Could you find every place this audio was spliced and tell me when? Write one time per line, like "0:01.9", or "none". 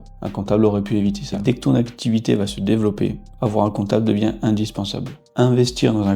0:01.3